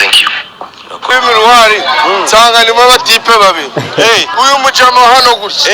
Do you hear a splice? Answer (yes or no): yes